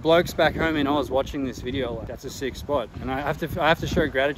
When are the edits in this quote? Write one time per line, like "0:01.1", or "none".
0:02.1